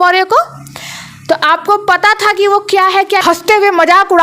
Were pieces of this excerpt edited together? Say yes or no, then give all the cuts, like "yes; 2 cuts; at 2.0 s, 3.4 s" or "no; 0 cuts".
yes; 1 cut; at 3.2 s